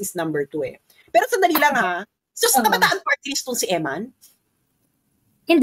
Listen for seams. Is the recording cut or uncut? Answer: uncut